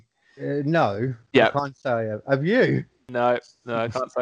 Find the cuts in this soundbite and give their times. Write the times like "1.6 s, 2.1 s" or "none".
3.0 s